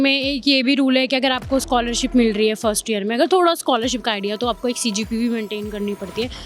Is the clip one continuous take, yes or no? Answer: yes